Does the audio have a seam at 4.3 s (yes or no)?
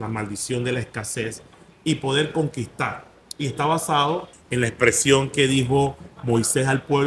yes